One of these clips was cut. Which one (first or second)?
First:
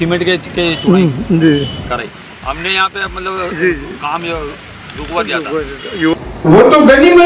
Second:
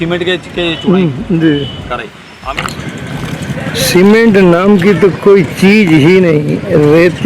second